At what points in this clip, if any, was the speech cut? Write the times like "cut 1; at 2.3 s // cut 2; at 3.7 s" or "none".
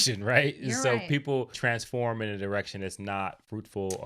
cut 1; at 1.5 s